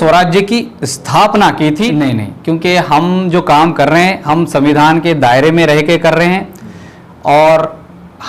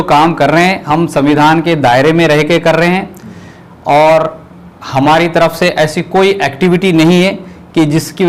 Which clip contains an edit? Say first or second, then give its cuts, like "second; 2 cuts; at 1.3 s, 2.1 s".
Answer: first; 1 cut; at 1.9 s